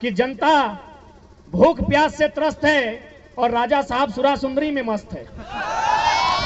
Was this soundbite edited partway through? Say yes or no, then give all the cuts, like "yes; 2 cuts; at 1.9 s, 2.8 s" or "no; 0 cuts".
no; 0 cuts